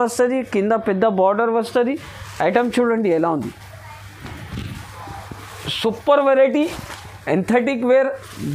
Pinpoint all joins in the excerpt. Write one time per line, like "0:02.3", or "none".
none